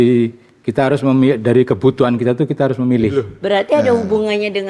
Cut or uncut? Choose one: cut